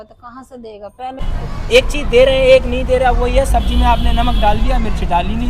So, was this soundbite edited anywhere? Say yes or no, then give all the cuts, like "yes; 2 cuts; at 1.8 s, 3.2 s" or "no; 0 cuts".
yes; 1 cut; at 1.3 s